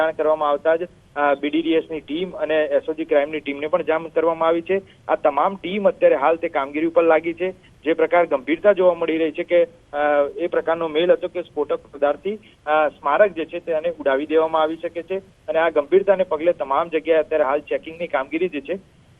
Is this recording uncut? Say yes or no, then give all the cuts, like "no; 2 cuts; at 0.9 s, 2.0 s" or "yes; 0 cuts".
no; 1 cut; at 12.8 s